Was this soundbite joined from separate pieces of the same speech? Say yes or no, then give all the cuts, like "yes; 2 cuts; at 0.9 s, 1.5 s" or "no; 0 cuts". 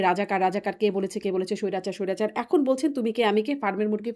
no; 0 cuts